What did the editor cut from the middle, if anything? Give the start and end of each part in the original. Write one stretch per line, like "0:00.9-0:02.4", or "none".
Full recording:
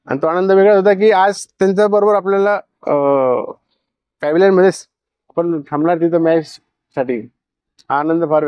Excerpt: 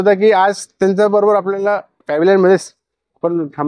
0:02.7-0:04.1